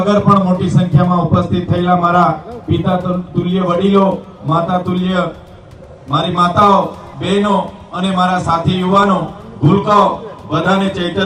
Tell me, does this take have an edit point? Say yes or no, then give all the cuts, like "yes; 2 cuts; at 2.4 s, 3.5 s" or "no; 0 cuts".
no; 0 cuts